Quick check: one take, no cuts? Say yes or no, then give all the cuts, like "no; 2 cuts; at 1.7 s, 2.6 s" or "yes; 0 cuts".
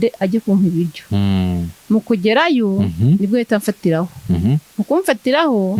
yes; 0 cuts